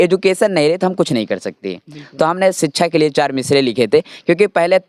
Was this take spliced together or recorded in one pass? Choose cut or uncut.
uncut